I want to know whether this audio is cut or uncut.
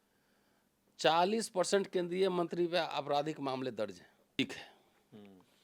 cut